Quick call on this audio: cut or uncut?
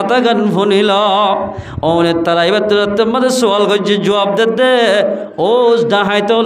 uncut